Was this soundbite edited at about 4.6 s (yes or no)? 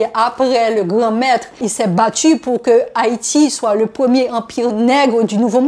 no